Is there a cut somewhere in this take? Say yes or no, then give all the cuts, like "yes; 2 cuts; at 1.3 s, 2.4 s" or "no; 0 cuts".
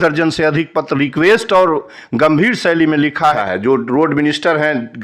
yes; 1 cut; at 3.4 s